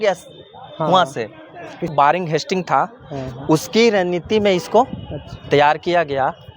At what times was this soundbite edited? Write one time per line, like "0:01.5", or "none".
0:01.9